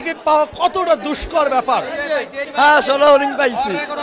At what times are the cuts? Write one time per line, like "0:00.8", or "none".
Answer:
0:02.4